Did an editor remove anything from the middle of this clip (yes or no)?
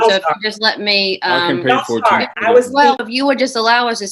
yes